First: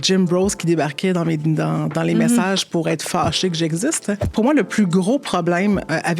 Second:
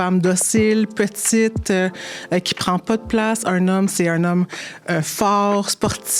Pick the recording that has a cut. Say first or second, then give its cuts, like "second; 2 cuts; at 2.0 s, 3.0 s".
first; 1 cut; at 4.3 s